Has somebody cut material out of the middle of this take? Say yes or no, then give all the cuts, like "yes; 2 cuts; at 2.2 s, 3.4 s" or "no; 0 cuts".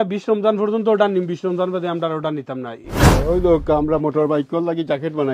yes; 1 cut; at 2.8 s